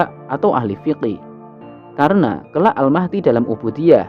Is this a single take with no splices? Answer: no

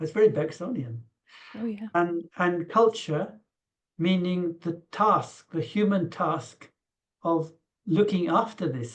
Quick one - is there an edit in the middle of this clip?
no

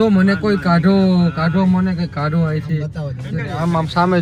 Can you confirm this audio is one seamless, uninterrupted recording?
yes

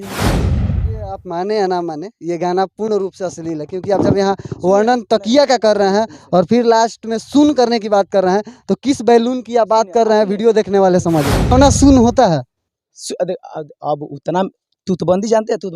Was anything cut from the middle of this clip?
yes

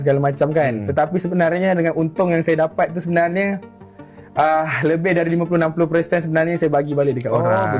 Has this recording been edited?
no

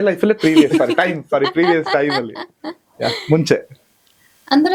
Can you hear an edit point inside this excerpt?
no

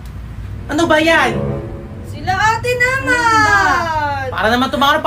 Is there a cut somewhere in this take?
no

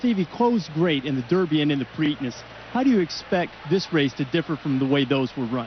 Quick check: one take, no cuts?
yes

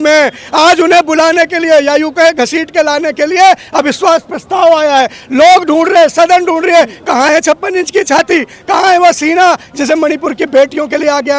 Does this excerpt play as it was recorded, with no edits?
yes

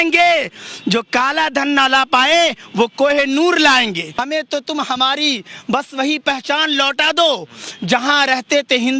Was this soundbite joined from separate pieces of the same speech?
yes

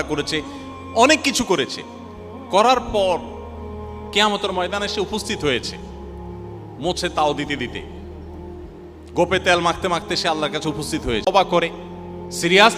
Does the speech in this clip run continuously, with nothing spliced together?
no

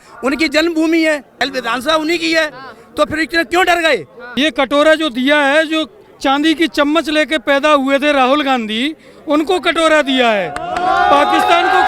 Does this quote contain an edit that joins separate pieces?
yes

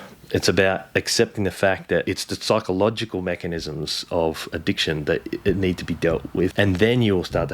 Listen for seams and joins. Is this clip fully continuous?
no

